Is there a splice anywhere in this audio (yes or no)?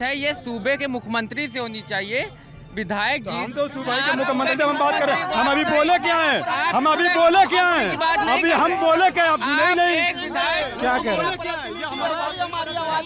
no